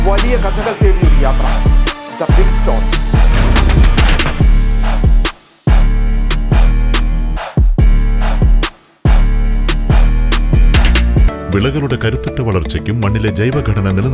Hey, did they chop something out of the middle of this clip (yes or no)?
yes